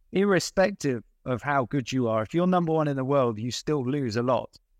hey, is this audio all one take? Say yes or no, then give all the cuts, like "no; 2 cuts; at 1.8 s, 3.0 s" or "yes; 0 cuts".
yes; 0 cuts